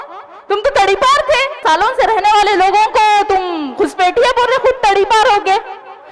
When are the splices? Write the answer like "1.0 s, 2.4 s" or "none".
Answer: 1.6 s